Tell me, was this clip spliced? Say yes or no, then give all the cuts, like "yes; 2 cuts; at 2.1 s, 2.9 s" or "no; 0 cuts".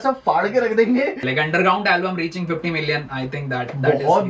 yes; 1 cut; at 1.3 s